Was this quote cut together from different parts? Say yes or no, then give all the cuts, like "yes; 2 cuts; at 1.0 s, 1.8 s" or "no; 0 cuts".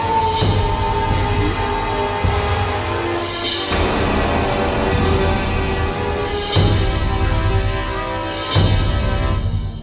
no; 0 cuts